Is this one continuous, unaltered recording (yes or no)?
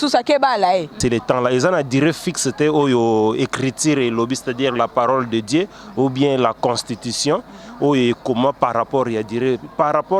no